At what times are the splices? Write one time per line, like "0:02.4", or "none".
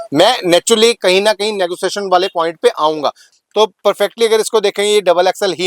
0:03.3